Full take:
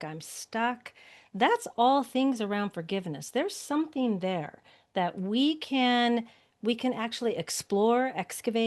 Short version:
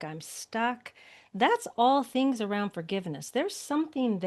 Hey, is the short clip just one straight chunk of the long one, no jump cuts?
yes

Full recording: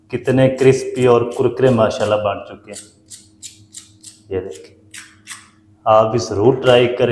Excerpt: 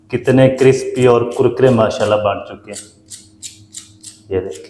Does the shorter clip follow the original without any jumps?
yes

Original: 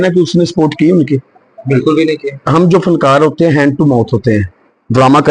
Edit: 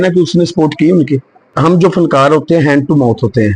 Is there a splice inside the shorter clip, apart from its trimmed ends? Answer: yes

